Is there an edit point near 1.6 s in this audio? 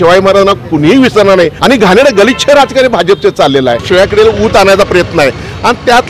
yes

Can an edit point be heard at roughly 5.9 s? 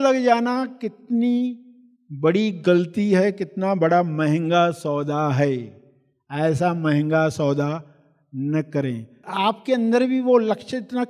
no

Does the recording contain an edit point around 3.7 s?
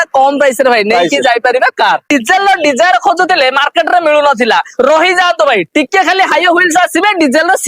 no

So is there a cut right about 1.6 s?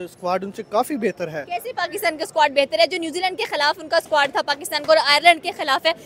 no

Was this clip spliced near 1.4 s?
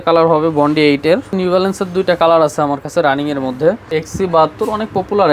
yes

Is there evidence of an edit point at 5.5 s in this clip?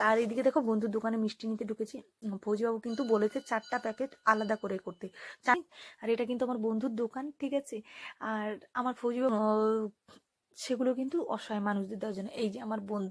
yes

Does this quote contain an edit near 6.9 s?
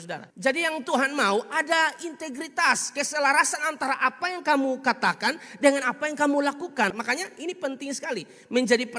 yes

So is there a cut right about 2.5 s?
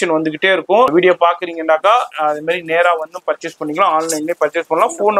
no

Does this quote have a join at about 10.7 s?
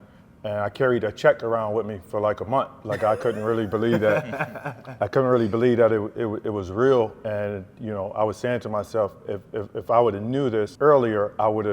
yes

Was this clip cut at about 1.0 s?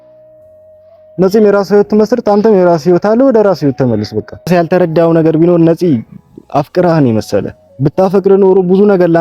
no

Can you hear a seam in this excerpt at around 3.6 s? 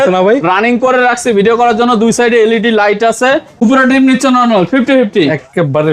yes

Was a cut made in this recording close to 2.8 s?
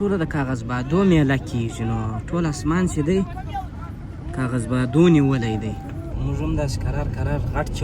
no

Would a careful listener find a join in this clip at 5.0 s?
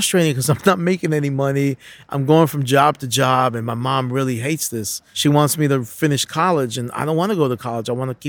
yes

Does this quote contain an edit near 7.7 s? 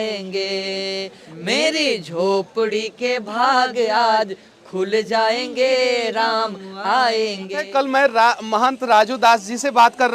yes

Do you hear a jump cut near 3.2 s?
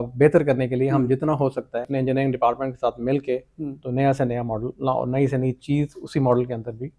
no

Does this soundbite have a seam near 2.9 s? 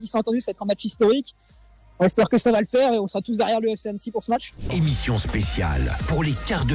no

